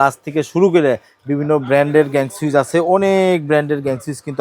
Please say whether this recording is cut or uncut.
uncut